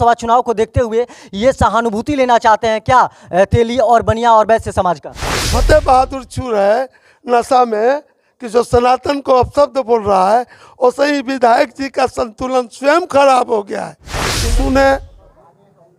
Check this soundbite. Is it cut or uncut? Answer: cut